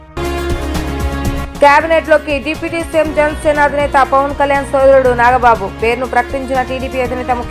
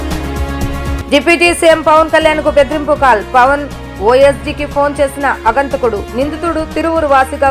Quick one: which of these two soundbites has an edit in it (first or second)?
second